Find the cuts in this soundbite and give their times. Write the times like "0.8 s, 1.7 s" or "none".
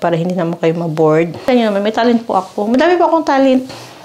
1.5 s

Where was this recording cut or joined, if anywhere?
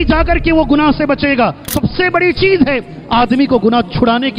1.7 s

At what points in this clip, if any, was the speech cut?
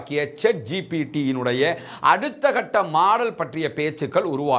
none

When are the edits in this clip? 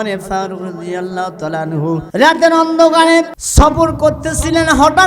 2.1 s, 3.4 s

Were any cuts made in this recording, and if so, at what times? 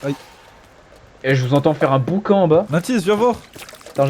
2.7 s

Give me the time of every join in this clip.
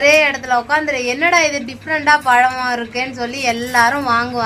none

